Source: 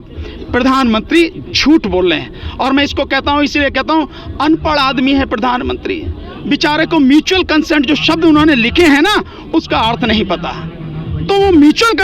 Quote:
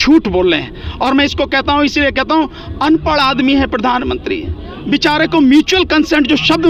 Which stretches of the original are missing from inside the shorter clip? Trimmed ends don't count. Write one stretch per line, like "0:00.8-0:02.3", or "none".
none